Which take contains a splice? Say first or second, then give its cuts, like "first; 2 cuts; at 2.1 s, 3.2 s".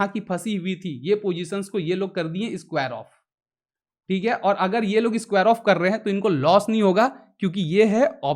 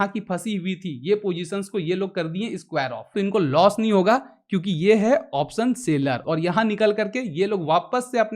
second; 2 cuts; at 3.1 s, 6.2 s